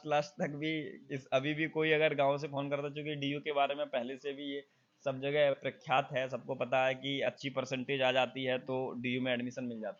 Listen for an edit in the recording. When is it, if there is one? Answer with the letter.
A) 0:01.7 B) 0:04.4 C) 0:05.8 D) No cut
D